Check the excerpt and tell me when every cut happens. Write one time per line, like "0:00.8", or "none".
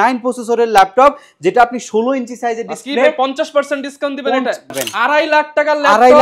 0:04.8